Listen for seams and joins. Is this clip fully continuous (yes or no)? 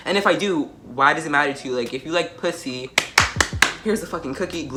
yes